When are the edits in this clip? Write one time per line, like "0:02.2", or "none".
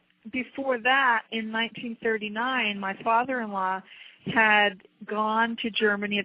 none